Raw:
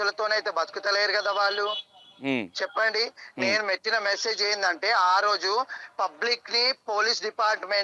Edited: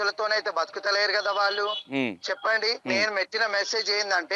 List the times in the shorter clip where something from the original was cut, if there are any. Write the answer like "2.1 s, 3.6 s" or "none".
1.8 s, 2.8 s